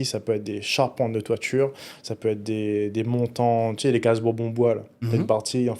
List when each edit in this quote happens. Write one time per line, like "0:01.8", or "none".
none